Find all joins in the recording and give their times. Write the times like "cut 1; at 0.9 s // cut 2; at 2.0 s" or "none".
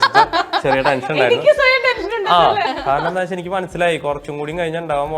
cut 1; at 2.7 s